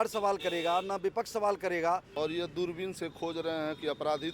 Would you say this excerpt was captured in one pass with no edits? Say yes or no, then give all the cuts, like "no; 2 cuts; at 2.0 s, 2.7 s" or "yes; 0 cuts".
no; 1 cut; at 2.1 s